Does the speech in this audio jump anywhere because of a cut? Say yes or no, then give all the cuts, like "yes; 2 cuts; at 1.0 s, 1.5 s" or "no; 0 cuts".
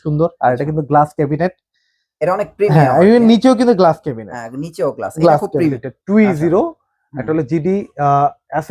yes; 1 cut; at 5.8 s